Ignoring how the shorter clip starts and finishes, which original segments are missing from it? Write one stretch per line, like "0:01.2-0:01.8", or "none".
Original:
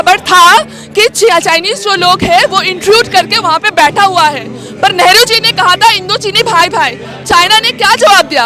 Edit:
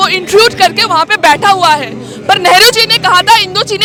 none